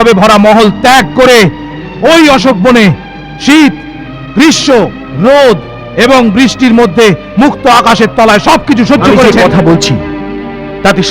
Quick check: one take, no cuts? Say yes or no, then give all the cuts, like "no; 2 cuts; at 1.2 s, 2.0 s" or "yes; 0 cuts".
no; 1 cut; at 9.2 s